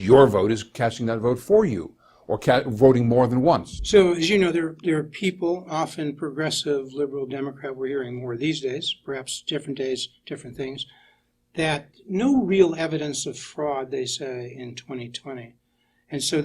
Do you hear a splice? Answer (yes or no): yes